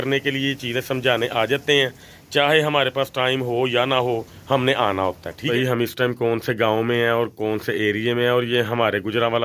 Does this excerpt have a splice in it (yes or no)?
yes